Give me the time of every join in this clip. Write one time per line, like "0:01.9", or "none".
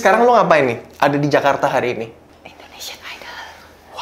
0:02.3